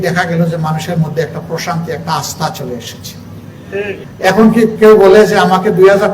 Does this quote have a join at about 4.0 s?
yes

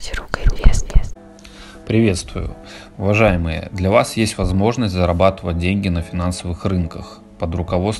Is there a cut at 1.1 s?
yes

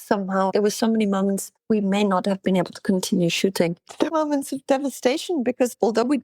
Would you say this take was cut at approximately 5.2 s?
no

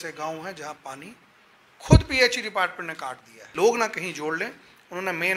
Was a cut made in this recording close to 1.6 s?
no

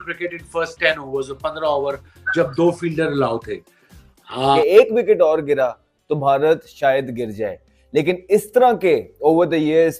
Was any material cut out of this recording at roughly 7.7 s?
no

